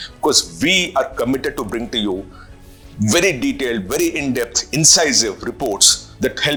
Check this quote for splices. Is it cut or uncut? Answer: uncut